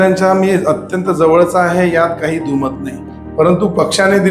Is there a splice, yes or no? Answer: no